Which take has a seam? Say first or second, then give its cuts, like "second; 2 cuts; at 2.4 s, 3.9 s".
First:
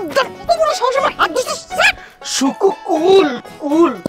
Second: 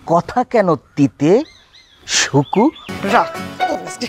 second; 1 cut; at 2.9 s